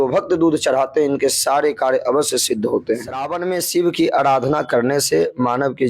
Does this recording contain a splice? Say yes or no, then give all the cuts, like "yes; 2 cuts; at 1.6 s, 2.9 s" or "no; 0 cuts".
yes; 1 cut; at 3.3 s